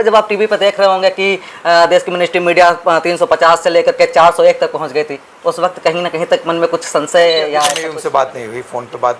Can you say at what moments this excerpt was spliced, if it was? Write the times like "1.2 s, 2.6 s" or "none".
7.9 s